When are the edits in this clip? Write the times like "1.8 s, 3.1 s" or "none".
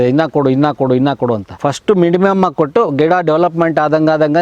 1.5 s